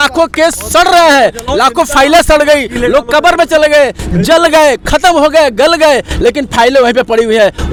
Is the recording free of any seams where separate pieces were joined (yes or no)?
yes